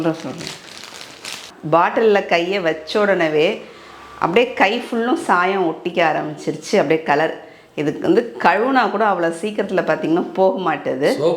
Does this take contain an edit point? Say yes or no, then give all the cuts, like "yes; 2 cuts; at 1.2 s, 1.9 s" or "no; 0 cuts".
yes; 1 cut; at 1.5 s